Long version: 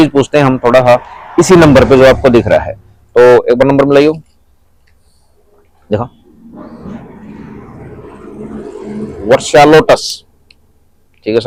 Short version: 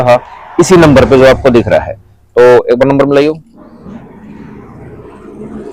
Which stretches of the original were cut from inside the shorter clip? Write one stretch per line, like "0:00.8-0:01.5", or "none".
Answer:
0:04.3-0:06.5